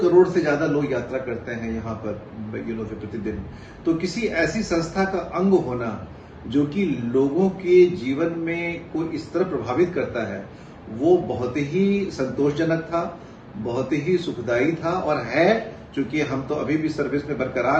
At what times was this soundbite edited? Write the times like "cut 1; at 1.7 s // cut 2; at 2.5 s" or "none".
none